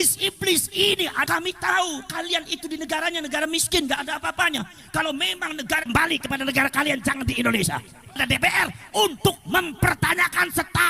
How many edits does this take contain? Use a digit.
2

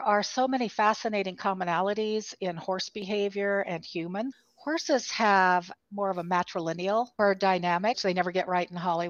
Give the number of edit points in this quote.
4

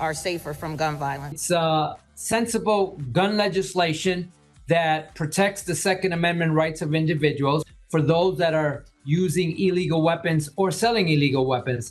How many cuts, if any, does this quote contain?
0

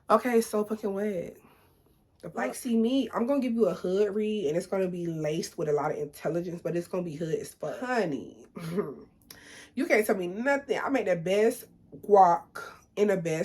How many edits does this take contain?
2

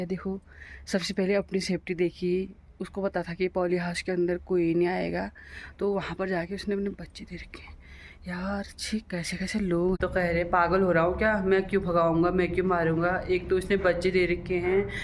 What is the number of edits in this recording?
1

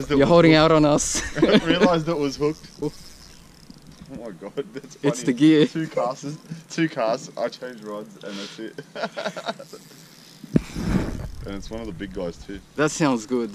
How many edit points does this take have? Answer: 1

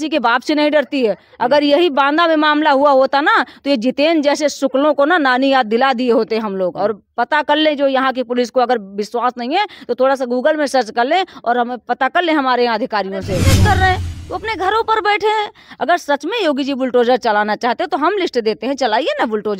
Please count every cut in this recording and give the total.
1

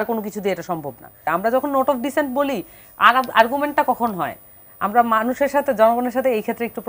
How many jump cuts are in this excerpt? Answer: 1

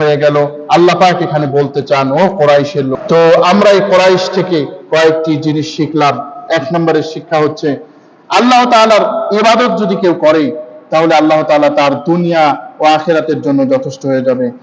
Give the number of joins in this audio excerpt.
1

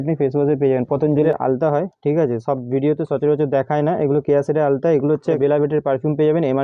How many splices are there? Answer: 2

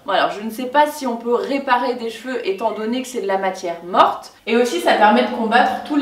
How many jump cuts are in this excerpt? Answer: 1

